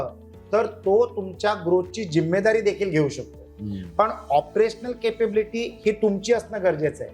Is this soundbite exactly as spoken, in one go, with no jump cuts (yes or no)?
yes